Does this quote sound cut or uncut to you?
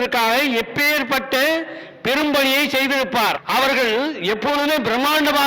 cut